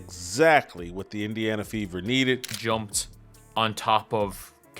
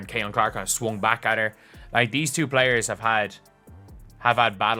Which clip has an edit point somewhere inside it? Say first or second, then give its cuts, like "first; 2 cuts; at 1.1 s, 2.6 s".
first; 1 cut; at 2.5 s